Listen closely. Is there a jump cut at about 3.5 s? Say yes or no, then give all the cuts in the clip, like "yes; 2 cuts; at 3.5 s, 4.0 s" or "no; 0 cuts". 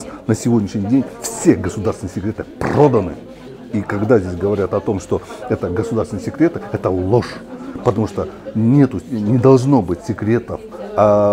no; 0 cuts